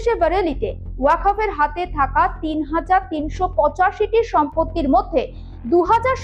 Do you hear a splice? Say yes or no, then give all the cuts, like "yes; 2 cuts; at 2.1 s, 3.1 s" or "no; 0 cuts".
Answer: no; 0 cuts